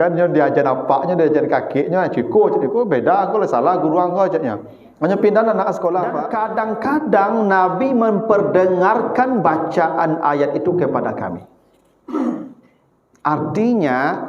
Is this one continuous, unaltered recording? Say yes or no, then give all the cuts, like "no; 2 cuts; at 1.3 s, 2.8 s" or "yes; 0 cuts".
no; 1 cut; at 6.2 s